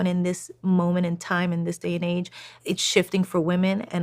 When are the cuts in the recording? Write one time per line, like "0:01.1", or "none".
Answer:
0:02.6